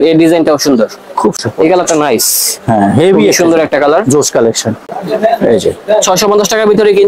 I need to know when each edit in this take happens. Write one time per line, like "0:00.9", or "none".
0:01.4
0:05.0